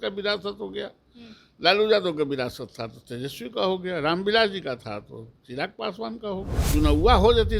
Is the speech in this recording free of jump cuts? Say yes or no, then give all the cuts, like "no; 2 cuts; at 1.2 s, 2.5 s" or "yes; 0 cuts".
no; 1 cut; at 6.6 s